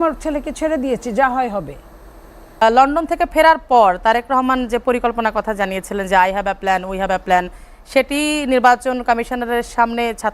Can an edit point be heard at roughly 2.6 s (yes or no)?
yes